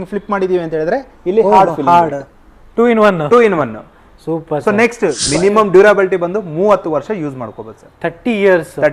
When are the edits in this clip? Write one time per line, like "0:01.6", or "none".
0:05.2